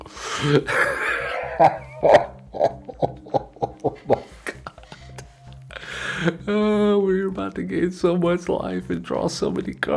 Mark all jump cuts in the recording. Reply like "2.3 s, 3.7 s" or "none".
none